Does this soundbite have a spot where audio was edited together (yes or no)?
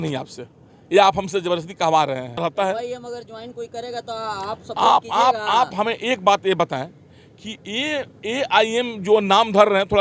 yes